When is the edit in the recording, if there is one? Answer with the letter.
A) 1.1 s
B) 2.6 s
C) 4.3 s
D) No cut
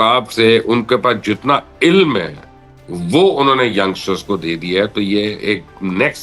D